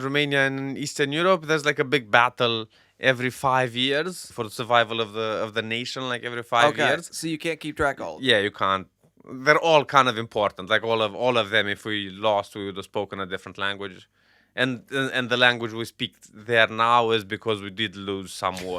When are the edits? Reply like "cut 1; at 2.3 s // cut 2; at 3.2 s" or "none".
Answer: cut 1; at 4.3 s